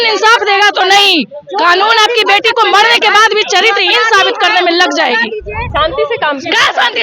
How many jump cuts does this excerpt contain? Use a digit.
1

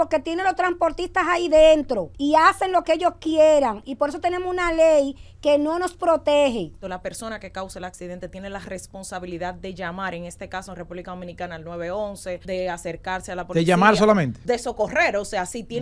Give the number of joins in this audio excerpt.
4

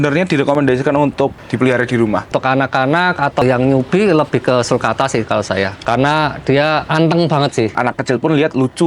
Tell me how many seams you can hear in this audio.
5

